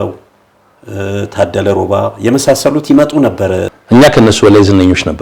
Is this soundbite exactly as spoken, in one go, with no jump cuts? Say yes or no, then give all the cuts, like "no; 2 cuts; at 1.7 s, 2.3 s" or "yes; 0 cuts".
no; 1 cut; at 3.7 s